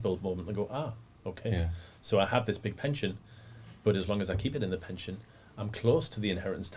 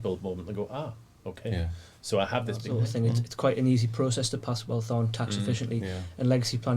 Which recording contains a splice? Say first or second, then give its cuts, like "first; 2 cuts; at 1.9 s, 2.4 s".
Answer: second; 1 cut; at 2.7 s